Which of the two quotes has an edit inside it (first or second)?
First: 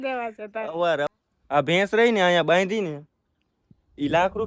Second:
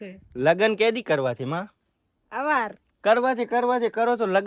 first